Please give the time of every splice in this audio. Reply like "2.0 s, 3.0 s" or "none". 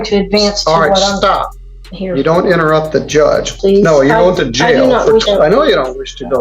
3.5 s, 5.2 s